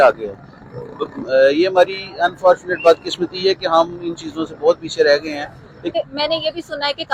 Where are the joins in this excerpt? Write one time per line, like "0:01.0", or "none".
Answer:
0:05.9